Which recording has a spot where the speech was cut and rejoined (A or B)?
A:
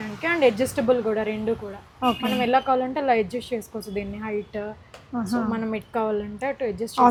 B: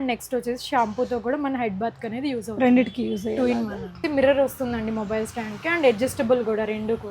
B